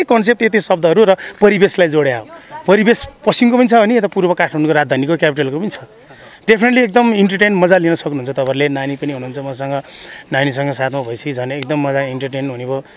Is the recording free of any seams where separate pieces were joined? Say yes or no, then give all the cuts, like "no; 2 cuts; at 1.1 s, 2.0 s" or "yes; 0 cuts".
yes; 0 cuts